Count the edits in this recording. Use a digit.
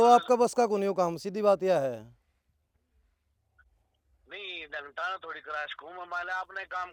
0